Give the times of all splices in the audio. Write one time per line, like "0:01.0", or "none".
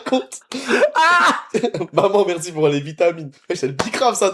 none